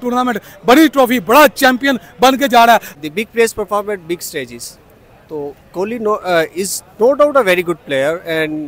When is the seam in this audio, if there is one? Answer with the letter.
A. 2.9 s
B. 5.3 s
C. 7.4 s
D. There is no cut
A